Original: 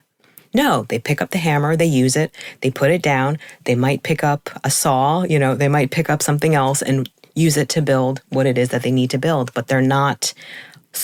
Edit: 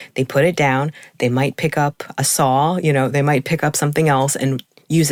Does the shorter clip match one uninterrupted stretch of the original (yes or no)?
yes